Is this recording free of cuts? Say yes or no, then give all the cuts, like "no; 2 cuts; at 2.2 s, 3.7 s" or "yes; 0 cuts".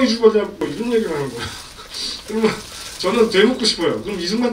yes; 0 cuts